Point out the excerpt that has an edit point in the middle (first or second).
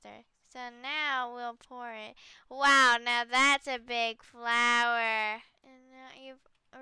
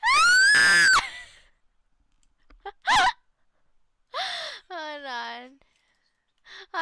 first